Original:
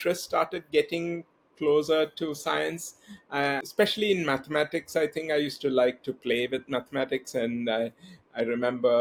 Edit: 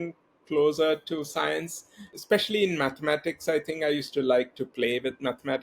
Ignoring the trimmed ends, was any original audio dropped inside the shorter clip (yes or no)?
yes